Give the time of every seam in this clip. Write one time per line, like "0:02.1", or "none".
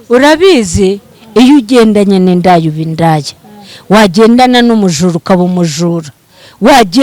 none